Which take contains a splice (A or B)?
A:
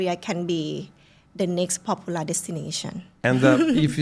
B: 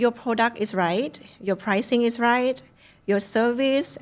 A